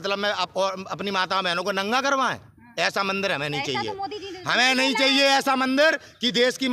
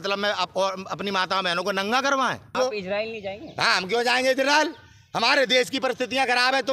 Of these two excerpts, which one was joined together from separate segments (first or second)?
second